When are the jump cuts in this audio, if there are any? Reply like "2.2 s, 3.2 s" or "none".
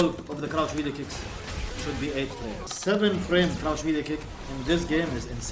2.7 s